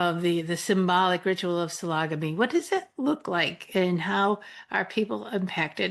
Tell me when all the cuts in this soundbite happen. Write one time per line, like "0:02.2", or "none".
none